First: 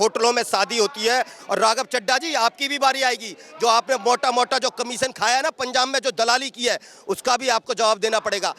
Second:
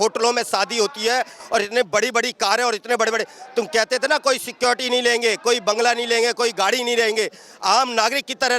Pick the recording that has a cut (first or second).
first